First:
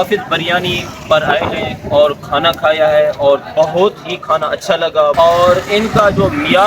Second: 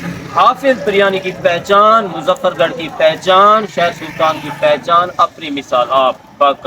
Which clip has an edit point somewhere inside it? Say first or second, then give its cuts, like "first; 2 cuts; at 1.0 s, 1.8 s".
first; 1 cut; at 5.1 s